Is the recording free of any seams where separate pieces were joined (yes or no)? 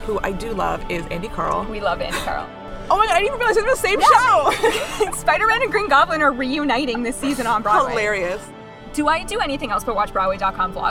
no